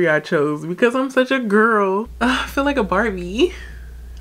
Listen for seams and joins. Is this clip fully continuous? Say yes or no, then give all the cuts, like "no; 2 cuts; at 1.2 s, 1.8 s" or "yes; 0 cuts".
no; 1 cut; at 2.1 s